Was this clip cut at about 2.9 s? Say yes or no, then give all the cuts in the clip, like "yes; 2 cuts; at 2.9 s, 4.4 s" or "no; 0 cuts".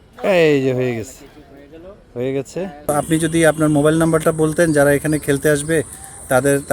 yes; 1 cut; at 2.9 s